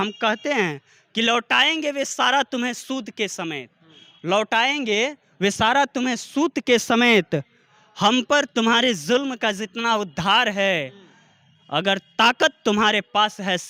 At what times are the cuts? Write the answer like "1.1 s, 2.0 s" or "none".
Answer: none